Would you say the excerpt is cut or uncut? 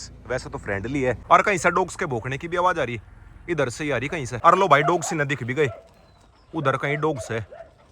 cut